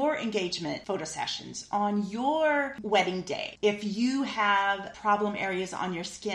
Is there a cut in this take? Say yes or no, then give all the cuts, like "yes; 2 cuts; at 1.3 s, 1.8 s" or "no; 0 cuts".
yes; 3 cuts; at 0.8 s, 3.4 s, 4.9 s